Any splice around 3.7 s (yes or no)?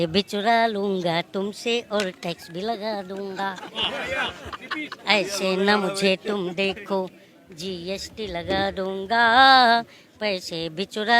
no